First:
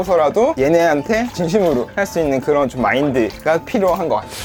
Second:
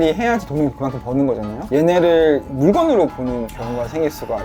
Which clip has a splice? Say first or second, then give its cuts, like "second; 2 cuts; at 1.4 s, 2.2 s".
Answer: second; 3 cuts; at 1.7 s, 2.5 s, 3.6 s